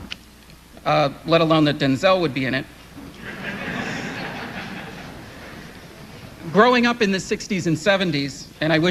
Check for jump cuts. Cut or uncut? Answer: uncut